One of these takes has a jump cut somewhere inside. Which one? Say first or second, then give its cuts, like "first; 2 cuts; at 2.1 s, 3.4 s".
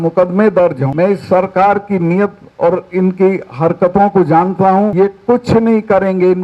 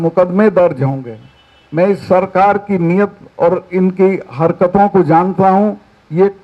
first; 2 cuts; at 0.8 s, 4.9 s